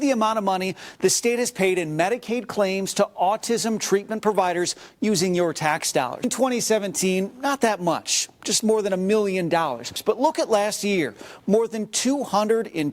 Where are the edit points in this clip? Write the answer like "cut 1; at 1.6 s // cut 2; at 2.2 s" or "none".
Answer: cut 1; at 6.2 s // cut 2; at 9.9 s

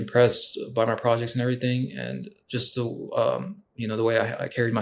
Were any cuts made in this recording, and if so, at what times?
none

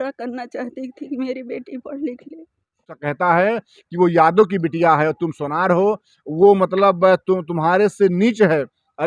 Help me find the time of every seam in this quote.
cut 1; at 3.0 s

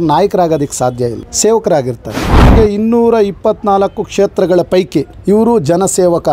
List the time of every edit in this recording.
cut 1; at 1.3 s // cut 2; at 2.5 s // cut 3; at 5.1 s

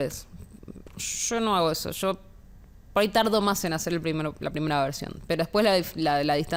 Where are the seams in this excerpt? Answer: none

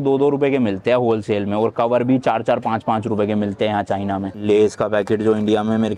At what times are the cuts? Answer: cut 1; at 4.3 s

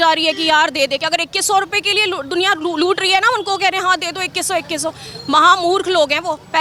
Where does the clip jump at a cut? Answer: none

